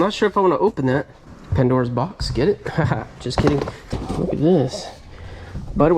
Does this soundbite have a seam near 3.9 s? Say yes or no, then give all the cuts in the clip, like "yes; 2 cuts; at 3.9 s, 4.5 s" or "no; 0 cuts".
yes; 1 cut; at 3.9 s